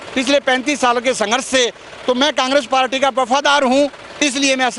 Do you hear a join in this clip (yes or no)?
no